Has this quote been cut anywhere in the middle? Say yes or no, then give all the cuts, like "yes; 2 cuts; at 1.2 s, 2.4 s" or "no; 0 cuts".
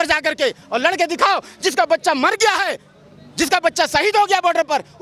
no; 0 cuts